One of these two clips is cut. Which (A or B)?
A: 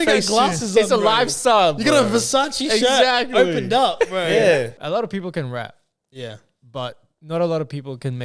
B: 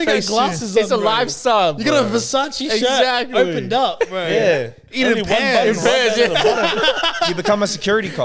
A